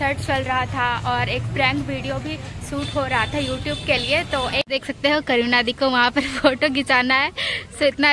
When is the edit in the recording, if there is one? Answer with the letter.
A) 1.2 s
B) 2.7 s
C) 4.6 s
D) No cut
C